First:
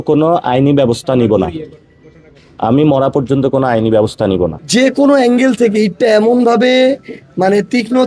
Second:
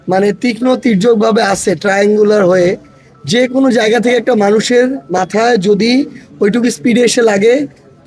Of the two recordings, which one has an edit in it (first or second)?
first